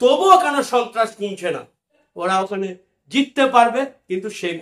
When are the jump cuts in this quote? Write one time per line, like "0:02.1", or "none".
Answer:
0:02.1